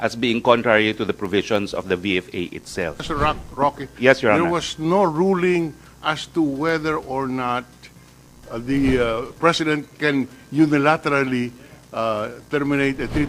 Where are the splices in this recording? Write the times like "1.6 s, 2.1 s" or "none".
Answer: 3.0 s